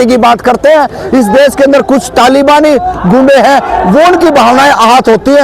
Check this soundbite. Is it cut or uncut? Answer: uncut